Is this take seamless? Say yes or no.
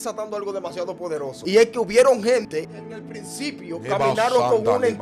no